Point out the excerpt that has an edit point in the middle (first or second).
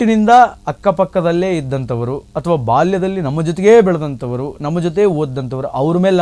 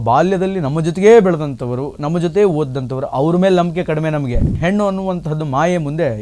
second